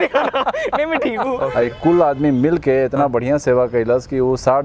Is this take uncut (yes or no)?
no